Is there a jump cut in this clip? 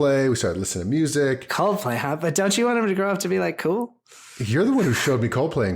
yes; 1 cut; at 1.5 s

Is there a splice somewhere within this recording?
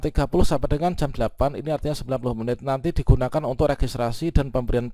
no; 0 cuts

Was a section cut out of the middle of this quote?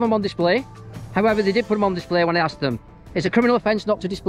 no; 0 cuts

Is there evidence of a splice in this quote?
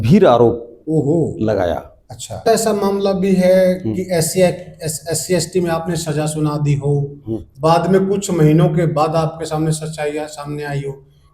yes; 1 cut; at 2.4 s

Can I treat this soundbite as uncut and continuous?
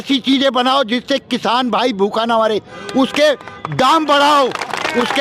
yes; 0 cuts

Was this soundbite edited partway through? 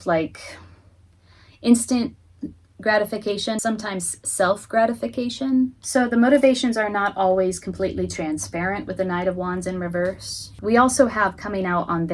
yes; 3 cuts; at 3.6 s, 5.8 s, 10.6 s

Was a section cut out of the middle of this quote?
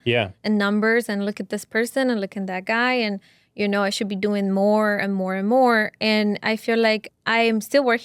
no; 0 cuts

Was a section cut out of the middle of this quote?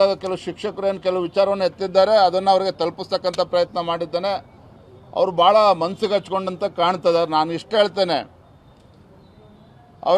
no; 0 cuts

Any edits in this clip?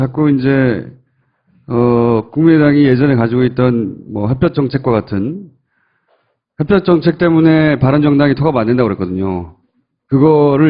no; 0 cuts

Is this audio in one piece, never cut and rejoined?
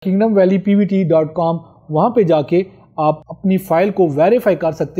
yes; 0 cuts

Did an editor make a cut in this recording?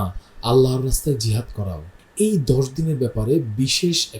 yes; 1 cut; at 1.9 s

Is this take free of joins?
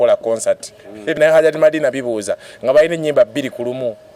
no; 1 cut; at 1.1 s

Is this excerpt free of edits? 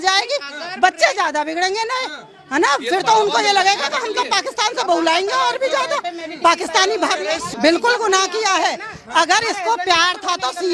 yes; 0 cuts

